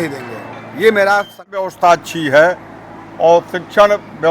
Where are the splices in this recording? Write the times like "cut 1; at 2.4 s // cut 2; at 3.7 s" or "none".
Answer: cut 1; at 1.7 s